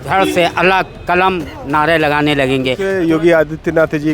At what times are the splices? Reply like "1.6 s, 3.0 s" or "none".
2.9 s